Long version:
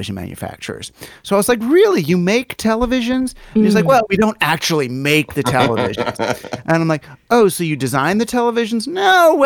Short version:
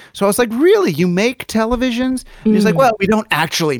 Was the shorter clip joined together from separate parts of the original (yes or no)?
no